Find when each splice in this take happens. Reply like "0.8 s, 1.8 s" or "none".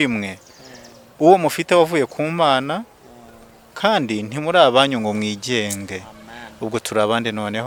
none

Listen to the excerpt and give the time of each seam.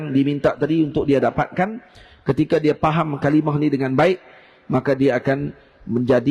none

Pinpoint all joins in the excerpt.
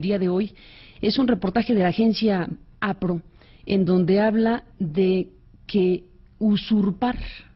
none

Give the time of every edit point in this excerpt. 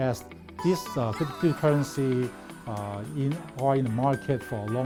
none

